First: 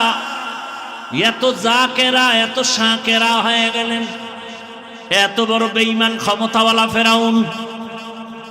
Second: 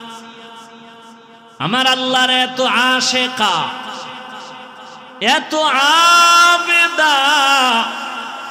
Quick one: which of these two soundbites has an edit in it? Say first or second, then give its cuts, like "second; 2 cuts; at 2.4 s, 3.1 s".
first; 1 cut; at 4.9 s